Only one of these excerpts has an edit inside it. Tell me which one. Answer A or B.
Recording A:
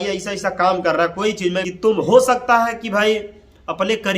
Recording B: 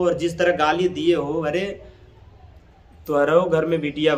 A